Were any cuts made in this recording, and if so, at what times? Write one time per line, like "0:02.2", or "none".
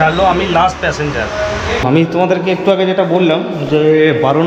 0:01.8